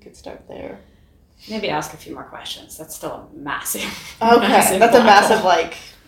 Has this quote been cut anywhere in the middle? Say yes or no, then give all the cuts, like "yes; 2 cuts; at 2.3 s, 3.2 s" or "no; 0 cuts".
no; 0 cuts